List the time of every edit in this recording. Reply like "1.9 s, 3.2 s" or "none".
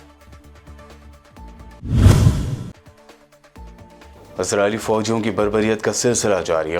1.4 s